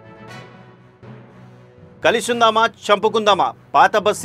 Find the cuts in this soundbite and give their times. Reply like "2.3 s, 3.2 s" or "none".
1.9 s